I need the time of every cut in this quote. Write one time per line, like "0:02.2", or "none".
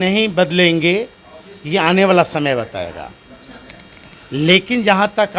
none